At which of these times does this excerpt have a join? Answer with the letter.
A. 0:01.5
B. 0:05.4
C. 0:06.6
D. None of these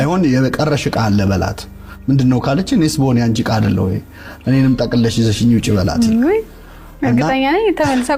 D